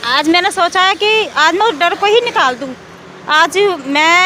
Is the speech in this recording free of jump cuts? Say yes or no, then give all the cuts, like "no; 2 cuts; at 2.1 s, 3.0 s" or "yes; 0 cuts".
yes; 0 cuts